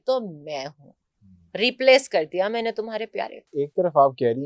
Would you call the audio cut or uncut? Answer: cut